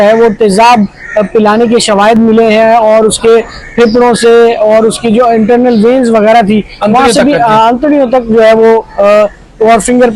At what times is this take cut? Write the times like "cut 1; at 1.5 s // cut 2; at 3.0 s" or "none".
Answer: none

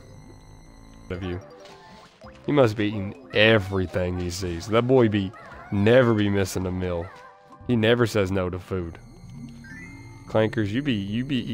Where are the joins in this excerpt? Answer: cut 1; at 1.1 s

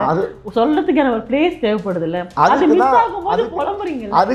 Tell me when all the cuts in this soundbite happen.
none

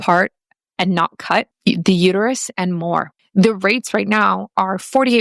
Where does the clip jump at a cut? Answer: cut 1; at 1.5 s // cut 2; at 3.2 s

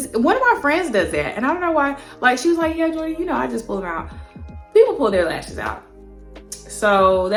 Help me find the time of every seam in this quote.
none

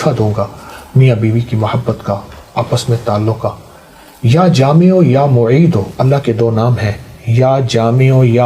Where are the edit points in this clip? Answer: none

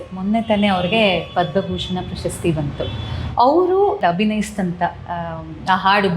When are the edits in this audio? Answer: cut 1; at 4.0 s

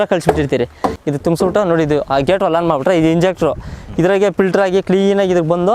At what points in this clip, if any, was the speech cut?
cut 1; at 1.0 s

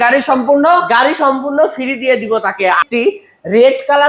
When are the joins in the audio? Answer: cut 1; at 2.8 s

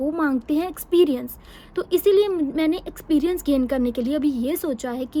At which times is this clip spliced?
none

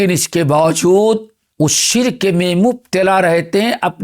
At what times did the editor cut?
cut 1; at 1.4 s

